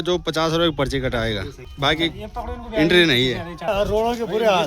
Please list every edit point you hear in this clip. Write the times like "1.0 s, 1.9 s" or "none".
1.6 s, 3.7 s